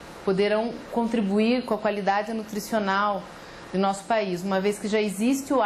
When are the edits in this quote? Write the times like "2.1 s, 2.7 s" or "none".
1.8 s

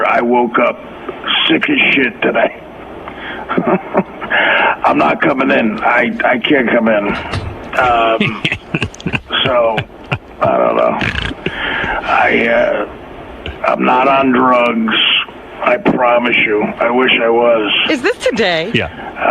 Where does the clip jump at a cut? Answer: 5.3 s

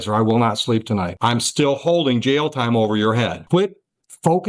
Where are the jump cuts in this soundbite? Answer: 1.1 s, 3.4 s

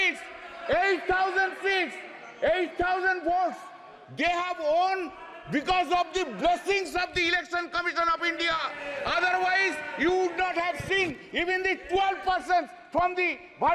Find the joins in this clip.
none

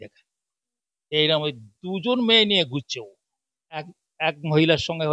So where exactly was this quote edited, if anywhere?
4.0 s

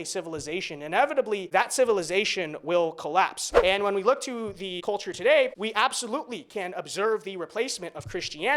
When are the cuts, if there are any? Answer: 1.4 s, 3.4 s, 4.7 s, 5.6 s

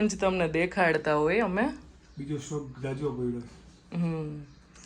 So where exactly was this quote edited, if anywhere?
none

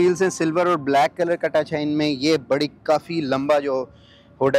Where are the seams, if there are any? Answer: none

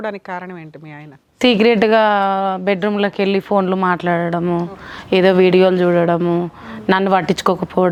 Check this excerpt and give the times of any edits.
none

